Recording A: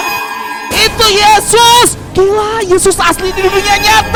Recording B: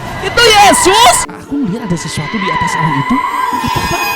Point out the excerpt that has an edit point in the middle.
B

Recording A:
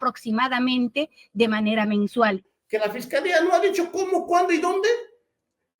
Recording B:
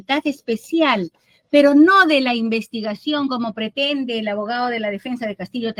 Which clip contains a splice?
A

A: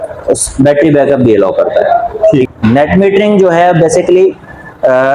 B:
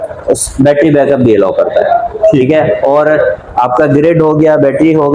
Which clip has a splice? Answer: A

